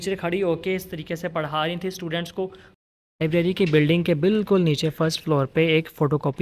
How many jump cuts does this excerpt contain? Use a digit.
1